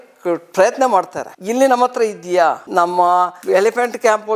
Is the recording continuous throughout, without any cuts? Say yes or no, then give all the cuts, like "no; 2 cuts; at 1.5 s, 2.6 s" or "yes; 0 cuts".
yes; 0 cuts